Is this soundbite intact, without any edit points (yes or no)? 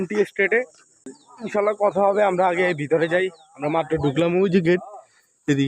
no